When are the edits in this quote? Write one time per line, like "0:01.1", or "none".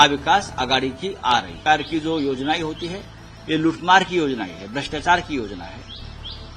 0:01.5